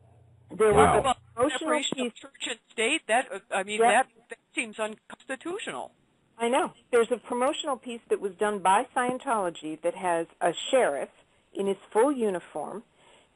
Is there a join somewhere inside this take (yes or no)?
yes